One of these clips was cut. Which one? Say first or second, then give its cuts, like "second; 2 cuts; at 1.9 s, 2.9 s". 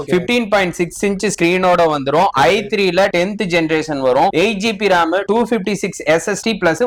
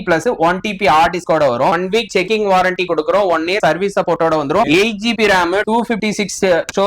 second; 2 cuts; at 1.7 s, 4.6 s